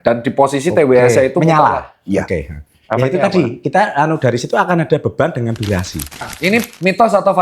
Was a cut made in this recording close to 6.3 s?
yes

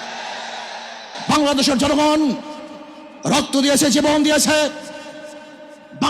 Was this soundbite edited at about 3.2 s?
no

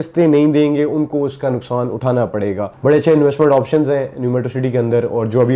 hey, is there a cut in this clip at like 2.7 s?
yes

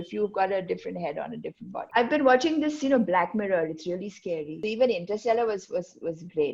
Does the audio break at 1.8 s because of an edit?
yes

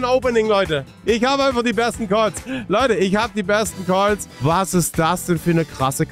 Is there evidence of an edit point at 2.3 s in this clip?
no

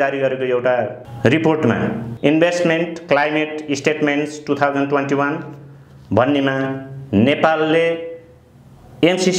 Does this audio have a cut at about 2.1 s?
yes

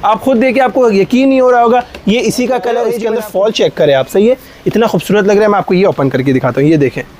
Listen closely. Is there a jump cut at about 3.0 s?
yes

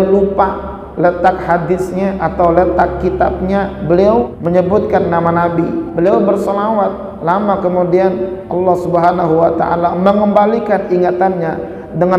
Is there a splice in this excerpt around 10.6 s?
no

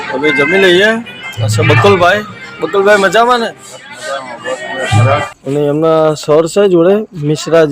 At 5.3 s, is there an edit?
yes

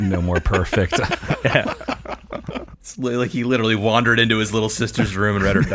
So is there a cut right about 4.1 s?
no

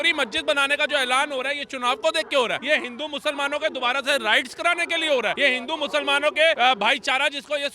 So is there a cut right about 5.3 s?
yes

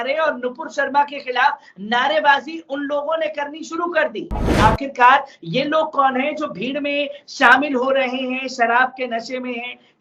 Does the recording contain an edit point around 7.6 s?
no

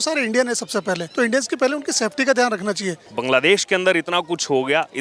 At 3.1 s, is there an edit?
yes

